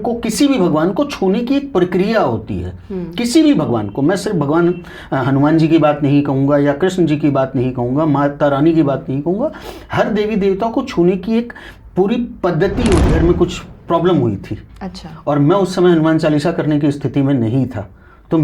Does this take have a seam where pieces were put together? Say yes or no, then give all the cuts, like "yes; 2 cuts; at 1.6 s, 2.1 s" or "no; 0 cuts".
yes; 1 cut; at 13.1 s